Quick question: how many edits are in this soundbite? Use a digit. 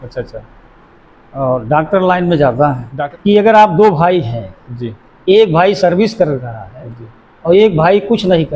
1